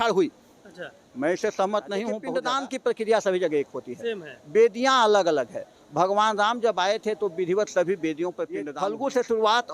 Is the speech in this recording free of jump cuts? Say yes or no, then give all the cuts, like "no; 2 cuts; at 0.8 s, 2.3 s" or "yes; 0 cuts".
no; 2 cuts; at 2.4 s, 8.7 s